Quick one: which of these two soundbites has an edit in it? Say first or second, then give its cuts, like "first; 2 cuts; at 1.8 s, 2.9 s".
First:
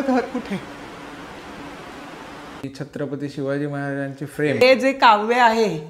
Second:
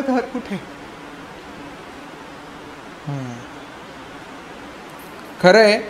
first; 2 cuts; at 2.6 s, 4.6 s